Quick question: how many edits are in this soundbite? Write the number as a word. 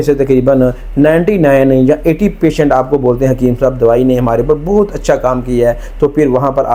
zero